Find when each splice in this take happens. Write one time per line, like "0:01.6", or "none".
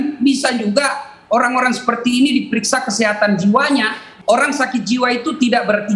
0:04.0

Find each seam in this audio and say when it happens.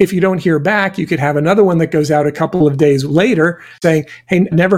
0:03.7

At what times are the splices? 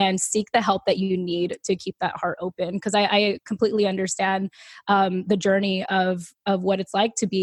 none

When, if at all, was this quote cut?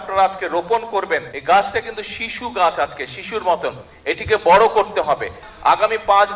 0:01.3
0:05.4

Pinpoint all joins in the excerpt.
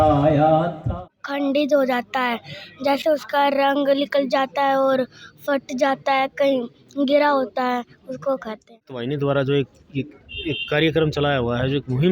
0:01.1
0:09.0

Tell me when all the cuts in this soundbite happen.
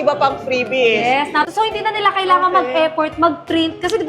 0:01.5

